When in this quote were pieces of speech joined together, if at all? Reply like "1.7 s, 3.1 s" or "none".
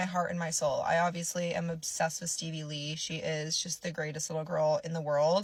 none